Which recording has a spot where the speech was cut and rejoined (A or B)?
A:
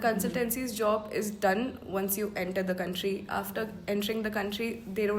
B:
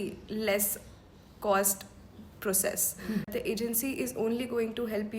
B